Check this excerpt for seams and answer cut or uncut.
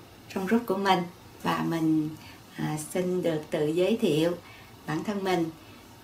cut